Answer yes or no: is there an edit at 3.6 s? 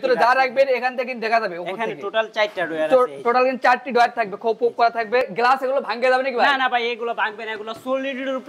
no